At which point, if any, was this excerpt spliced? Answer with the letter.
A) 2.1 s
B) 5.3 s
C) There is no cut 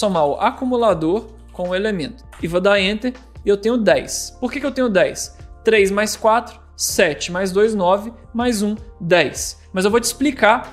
A